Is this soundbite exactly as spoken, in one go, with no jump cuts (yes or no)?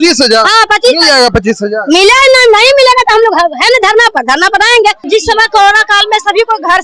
no